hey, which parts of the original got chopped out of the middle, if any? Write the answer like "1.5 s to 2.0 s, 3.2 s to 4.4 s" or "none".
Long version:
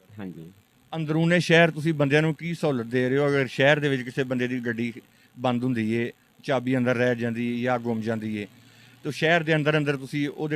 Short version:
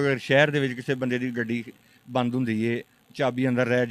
none